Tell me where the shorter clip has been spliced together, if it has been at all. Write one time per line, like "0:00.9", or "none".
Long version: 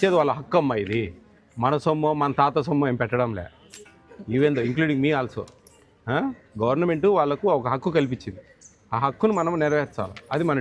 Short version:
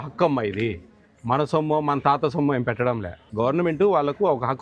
0:03.2